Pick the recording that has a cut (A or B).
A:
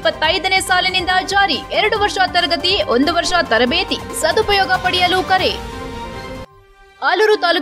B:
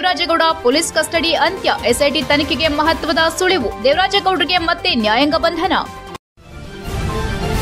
B